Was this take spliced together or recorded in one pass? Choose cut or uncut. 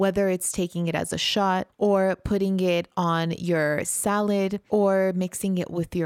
cut